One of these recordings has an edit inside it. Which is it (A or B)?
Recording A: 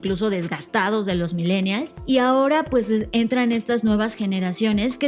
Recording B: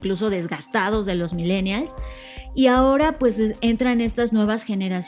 A